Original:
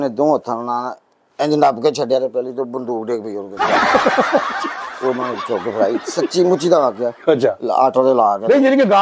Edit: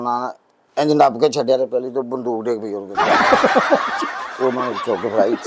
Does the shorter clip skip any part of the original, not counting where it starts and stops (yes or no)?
no